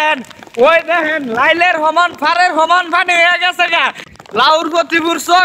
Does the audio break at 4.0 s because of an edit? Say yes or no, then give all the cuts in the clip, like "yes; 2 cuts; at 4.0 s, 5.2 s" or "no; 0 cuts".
yes; 1 cut; at 4.0 s